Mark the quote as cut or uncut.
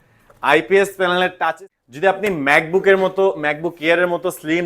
cut